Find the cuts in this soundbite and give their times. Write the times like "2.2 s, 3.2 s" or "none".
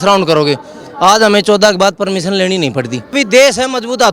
3.1 s